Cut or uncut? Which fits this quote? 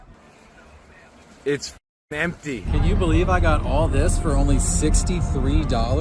cut